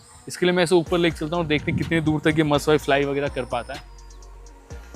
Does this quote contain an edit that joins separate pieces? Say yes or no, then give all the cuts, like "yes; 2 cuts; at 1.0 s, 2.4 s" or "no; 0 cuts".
yes; 1 cut; at 3.8 s